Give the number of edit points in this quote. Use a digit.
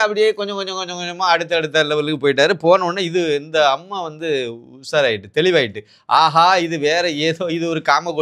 0